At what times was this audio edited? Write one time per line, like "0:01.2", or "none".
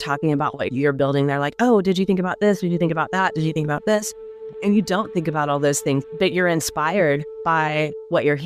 0:07.3